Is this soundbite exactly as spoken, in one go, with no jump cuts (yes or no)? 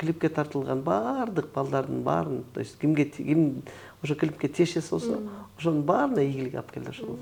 yes